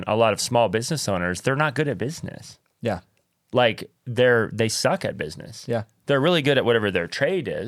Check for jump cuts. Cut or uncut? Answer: uncut